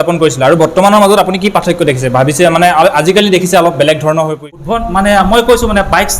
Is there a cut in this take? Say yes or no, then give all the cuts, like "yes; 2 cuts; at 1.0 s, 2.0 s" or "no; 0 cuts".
yes; 1 cut; at 4.5 s